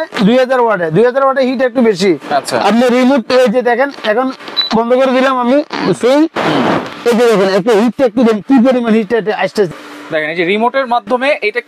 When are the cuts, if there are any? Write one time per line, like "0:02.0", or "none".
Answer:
none